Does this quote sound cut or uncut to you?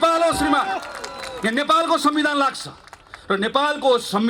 uncut